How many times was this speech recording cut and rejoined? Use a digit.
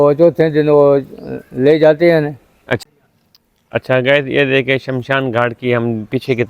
1